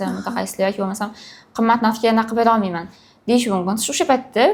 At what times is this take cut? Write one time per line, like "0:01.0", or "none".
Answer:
none